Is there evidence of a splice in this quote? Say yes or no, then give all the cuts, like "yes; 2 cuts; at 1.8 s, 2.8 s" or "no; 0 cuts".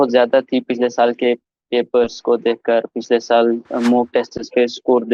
no; 0 cuts